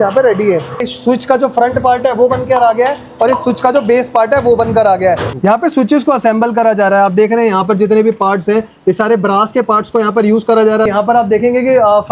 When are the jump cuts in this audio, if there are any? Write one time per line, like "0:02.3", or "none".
0:00.8
0:05.3
0:10.9